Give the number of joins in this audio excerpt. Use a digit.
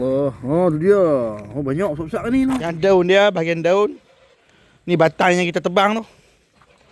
1